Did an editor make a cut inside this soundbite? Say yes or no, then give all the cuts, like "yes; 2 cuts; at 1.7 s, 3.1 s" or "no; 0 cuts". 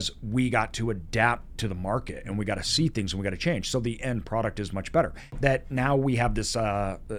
yes; 1 cut; at 5.2 s